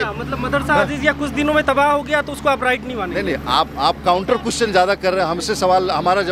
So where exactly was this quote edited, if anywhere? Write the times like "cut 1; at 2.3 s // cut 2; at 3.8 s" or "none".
none